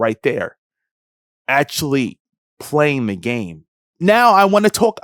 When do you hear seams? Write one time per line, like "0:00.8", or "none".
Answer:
0:03.9